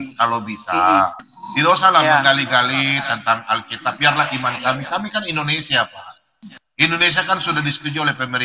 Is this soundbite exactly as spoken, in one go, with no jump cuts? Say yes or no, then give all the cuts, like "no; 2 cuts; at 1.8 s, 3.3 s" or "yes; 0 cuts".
no; 1 cut; at 1.2 s